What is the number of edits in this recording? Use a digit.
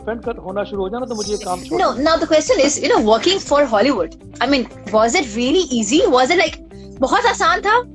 1